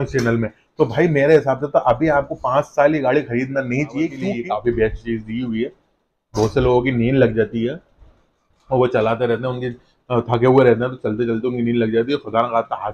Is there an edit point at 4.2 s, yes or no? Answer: yes